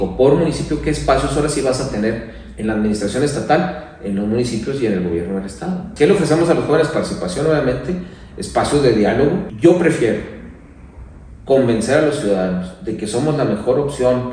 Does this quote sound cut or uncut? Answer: cut